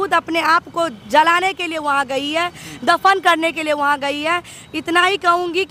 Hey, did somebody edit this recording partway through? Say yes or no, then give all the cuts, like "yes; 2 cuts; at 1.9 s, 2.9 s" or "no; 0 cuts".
no; 0 cuts